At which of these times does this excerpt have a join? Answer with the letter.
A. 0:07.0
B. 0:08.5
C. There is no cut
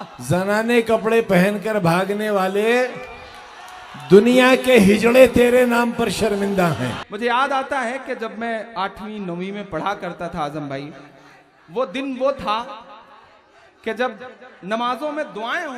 A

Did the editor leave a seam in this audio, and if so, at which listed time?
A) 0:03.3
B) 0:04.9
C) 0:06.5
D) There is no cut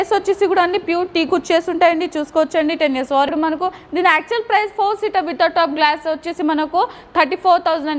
A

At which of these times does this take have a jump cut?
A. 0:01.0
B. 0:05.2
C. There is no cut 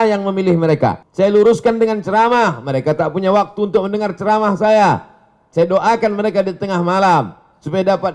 A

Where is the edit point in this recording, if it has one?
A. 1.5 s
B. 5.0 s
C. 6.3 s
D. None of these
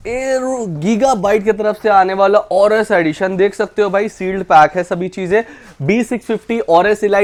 D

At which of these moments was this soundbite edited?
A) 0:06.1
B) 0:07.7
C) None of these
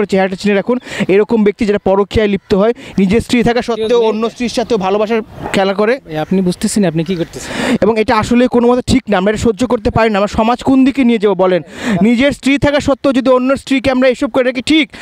C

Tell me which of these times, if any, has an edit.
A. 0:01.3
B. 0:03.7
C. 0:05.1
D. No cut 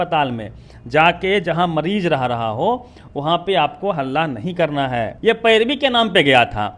C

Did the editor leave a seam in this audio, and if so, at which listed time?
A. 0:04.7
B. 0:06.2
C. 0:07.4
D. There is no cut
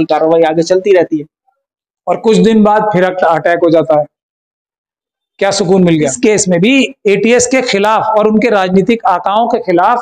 B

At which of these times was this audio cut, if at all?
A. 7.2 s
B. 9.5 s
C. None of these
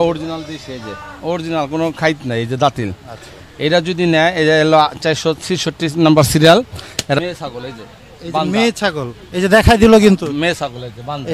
A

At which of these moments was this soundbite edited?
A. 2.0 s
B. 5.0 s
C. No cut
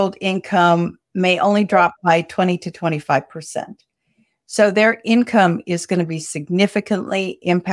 C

